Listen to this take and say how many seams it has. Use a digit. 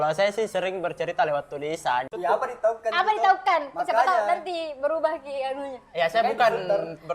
1